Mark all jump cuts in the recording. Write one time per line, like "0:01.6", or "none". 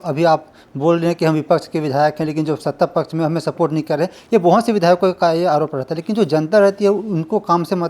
none